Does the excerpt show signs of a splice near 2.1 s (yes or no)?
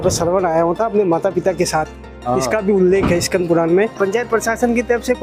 no